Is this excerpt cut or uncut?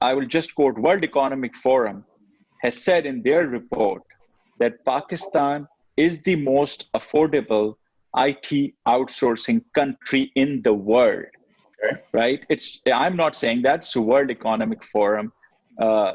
uncut